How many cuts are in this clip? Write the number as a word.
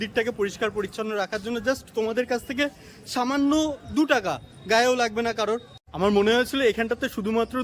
one